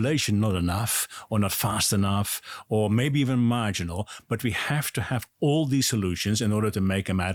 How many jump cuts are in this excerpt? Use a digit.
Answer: 0